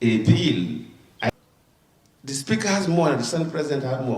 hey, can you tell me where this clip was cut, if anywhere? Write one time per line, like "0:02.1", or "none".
0:01.3